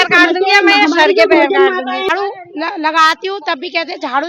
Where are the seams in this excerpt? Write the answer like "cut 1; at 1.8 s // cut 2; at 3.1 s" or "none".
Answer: cut 1; at 2.1 s